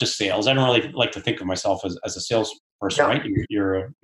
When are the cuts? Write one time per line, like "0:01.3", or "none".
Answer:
none